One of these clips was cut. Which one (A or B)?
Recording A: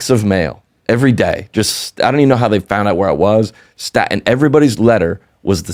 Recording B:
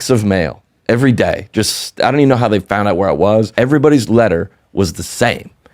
B